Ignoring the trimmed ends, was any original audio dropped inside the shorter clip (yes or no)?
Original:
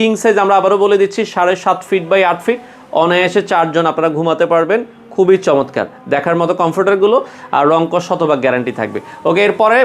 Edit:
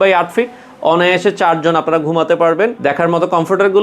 yes